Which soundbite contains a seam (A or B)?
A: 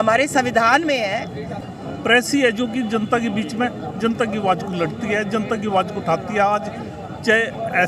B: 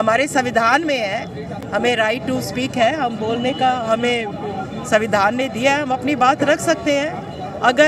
A